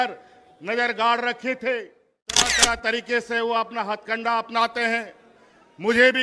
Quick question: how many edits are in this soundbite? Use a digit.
1